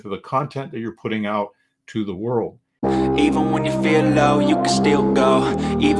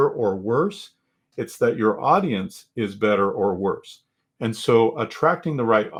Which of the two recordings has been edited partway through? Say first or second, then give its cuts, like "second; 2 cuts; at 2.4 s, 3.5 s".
first; 1 cut; at 2.6 s